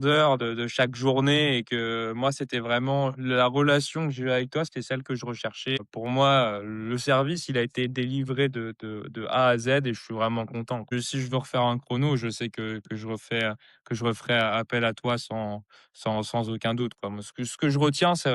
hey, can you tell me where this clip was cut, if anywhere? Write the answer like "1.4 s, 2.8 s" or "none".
5.8 s, 10.9 s